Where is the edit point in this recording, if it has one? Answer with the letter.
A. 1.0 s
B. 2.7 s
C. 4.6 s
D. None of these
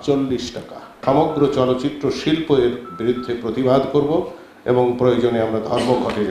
A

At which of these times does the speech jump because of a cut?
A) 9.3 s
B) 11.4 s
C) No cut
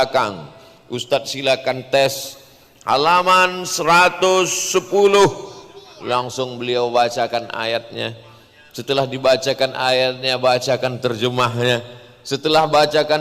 C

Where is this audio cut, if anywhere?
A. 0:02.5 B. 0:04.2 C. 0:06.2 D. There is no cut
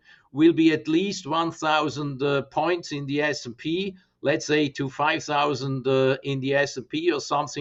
D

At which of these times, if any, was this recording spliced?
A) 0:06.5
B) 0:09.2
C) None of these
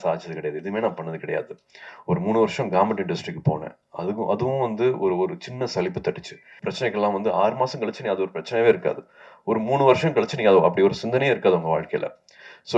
A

